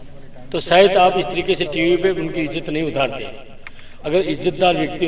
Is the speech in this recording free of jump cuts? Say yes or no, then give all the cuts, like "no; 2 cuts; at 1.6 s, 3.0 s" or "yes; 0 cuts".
yes; 0 cuts